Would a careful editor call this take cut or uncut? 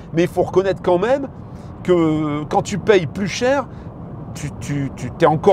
uncut